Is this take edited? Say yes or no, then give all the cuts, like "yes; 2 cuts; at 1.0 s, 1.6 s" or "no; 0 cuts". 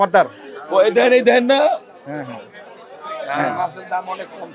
no; 0 cuts